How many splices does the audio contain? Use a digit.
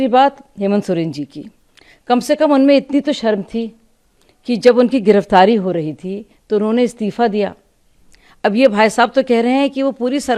0